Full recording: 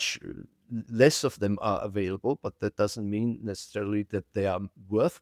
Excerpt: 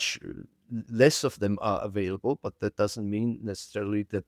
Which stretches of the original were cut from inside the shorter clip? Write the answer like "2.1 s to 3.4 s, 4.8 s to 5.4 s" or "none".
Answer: none